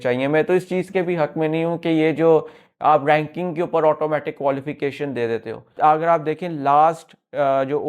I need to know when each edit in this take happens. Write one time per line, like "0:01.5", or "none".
0:05.7